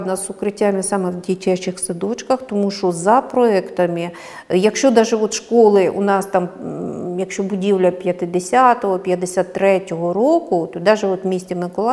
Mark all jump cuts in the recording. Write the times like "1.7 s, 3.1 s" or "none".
none